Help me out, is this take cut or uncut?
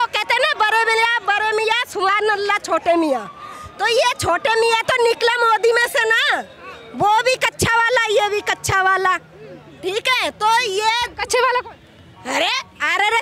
uncut